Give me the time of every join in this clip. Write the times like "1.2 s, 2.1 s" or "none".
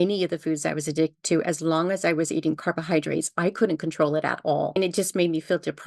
4.8 s